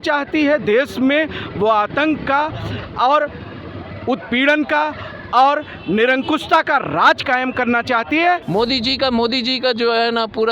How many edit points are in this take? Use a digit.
1